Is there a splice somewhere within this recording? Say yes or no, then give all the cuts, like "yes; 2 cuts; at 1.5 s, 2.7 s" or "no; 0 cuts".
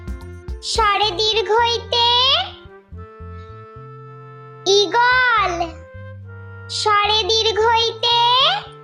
no; 0 cuts